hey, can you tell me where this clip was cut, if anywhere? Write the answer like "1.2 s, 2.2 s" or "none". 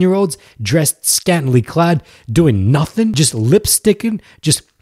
3.1 s